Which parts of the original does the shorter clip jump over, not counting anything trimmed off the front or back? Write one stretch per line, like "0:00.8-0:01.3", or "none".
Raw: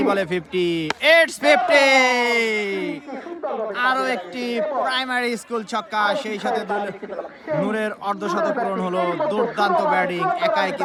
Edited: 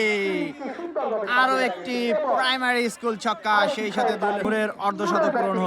0:06.9-0:07.7